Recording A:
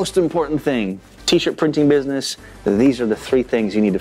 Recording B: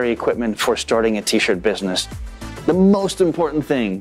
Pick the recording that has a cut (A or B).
B